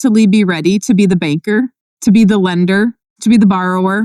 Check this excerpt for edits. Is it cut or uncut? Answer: cut